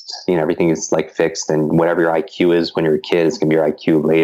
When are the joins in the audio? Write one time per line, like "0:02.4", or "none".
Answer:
none